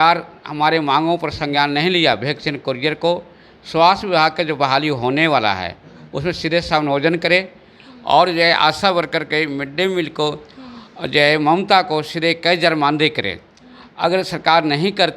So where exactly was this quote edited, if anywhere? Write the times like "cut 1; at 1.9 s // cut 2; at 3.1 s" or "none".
none